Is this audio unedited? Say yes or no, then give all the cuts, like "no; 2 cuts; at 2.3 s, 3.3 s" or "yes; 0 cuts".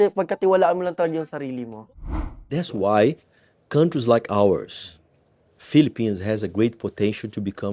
no; 1 cut; at 2.2 s